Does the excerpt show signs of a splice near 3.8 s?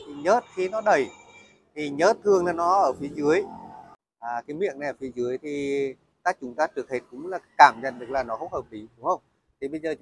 yes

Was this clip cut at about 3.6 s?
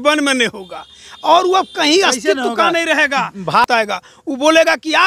yes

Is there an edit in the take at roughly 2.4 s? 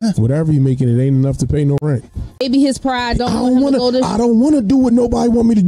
yes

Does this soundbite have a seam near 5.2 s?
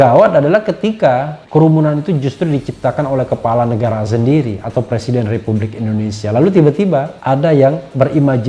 no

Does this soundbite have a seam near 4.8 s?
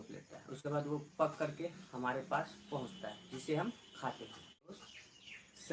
yes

